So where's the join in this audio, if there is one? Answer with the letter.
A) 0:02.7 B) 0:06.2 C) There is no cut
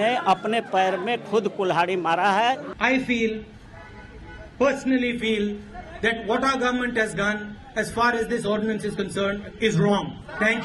A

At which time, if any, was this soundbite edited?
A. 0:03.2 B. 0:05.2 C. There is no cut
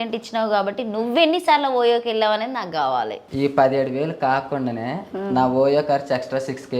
A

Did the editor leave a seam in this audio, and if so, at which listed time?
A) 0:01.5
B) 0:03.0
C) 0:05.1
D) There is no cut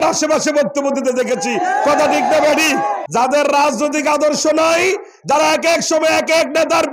B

